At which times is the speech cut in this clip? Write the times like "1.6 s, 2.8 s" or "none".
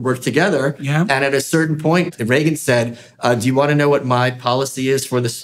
2.1 s